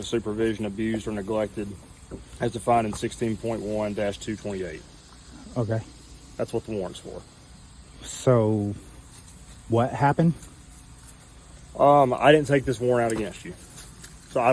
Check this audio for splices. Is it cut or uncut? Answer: uncut